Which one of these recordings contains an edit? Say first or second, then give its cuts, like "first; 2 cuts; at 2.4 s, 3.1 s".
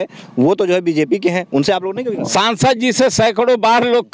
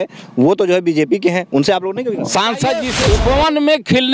second; 1 cut; at 3.0 s